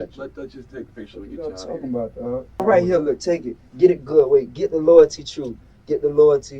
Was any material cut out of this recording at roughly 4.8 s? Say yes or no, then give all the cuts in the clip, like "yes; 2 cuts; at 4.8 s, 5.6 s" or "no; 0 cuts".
no; 1 cut; at 2.6 s